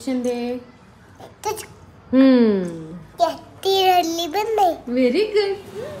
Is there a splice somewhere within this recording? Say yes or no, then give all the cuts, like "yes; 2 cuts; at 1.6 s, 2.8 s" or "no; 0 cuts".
no; 0 cuts